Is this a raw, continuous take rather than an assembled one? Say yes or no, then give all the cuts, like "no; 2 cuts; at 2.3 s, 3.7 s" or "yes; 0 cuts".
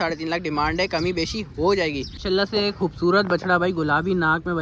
no; 1 cut; at 2.1 s